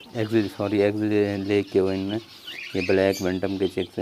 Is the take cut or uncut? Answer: uncut